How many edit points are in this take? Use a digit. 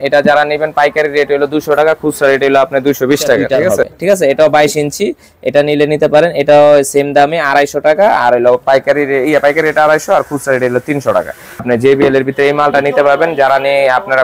2